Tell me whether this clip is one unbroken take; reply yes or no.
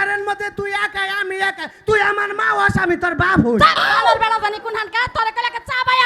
yes